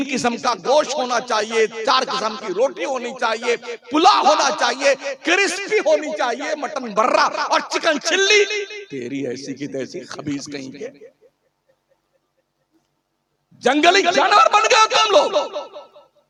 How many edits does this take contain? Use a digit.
0